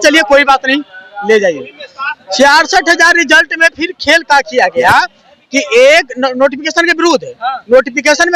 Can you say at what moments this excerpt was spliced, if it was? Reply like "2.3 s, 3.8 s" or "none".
none

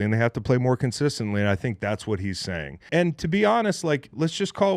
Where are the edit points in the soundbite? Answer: 2.9 s

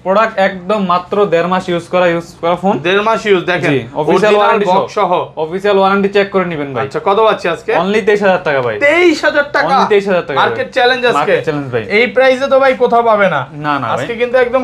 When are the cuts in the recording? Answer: none

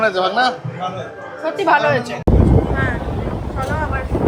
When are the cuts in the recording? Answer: 2.2 s

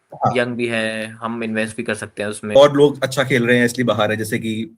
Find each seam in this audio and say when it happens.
2.6 s

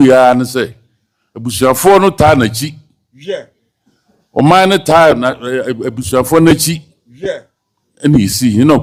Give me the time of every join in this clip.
none

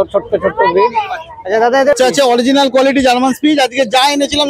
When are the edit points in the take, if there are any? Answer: 2.0 s

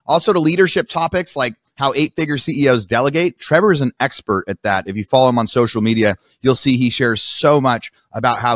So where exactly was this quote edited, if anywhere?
none

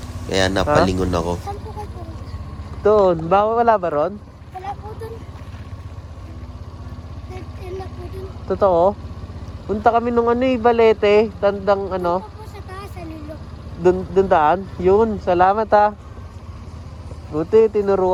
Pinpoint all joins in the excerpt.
none

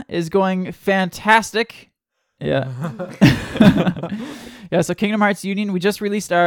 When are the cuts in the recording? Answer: 2.2 s

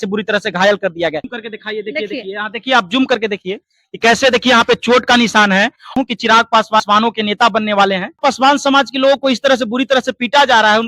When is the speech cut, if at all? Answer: 1.3 s, 5.9 s, 6.8 s, 8.2 s

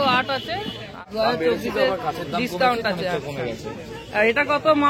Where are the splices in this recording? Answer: 1.0 s

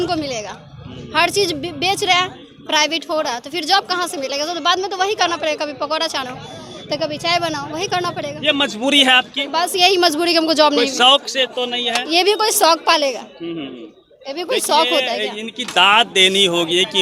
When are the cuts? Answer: none

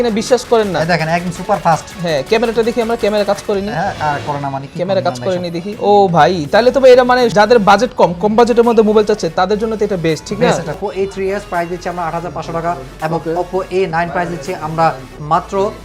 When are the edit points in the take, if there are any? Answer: 5.7 s, 7.3 s, 10.8 s

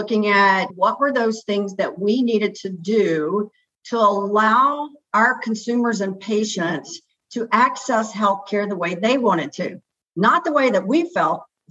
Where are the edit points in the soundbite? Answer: none

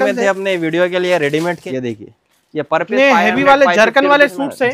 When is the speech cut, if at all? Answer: 1.6 s

